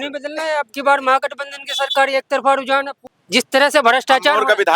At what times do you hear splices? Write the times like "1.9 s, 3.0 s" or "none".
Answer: 3.1 s